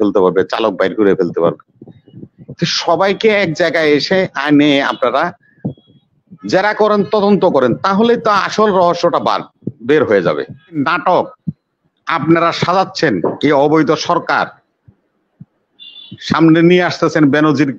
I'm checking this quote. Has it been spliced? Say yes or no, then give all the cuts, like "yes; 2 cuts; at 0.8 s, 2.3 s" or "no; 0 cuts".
yes; 1 cut; at 10.8 s